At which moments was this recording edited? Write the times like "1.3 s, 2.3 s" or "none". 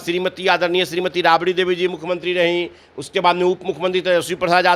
none

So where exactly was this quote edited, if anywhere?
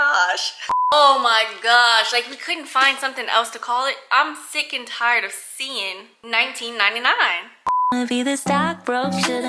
0.9 s, 7.9 s

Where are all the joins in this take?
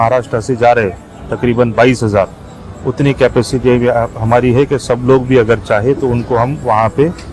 none

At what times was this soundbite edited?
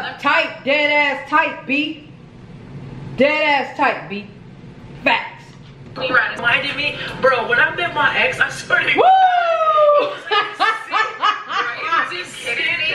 6.4 s

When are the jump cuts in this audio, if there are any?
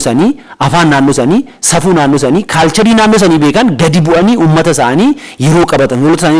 none

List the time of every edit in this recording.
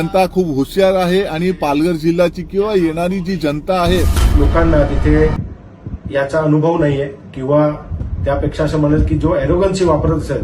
4.2 s

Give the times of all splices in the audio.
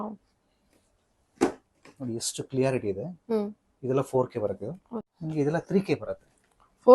5.1 s

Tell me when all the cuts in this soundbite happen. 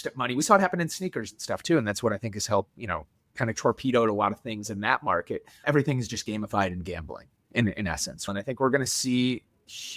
5.6 s, 8.3 s

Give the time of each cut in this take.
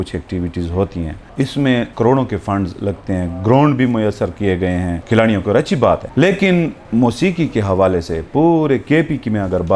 1.7 s, 5.0 s, 6.1 s, 6.8 s

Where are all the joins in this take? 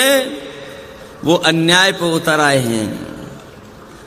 none

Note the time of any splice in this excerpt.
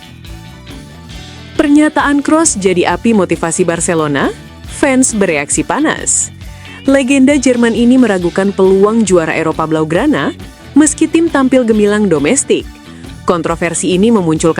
1.6 s

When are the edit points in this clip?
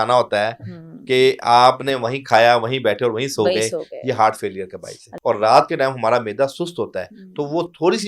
5.1 s

